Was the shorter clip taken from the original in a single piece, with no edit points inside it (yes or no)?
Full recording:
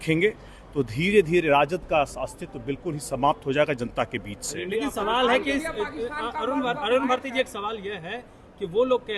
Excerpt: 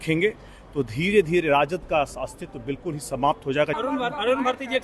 no